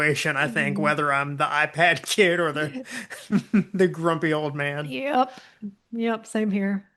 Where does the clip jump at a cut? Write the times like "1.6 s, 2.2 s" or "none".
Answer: 4.9 s